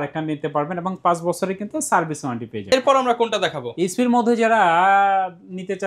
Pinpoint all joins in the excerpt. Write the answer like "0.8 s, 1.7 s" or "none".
none